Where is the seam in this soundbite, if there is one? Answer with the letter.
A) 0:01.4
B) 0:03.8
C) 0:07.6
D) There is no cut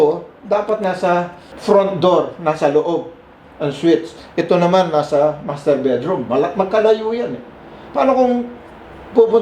A